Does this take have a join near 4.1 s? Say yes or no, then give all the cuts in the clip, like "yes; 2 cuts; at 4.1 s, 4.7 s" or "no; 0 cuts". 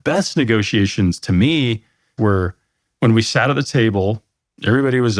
no; 1 cut; at 2.1 s